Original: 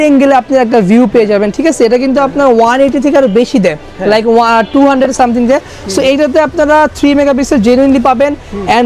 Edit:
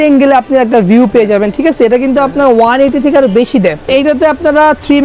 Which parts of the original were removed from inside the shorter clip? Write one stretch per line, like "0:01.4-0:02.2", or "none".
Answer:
0:03.8-0:06.0